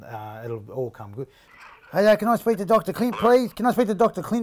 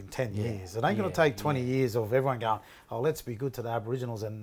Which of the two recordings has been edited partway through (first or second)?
first